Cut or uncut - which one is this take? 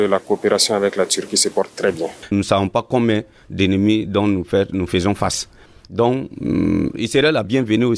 cut